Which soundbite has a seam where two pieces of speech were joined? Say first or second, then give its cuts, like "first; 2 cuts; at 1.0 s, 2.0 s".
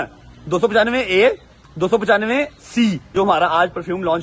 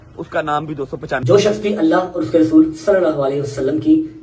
second; 1 cut; at 1.2 s